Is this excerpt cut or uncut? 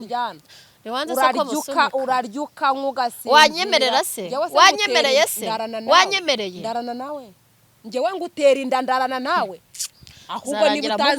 uncut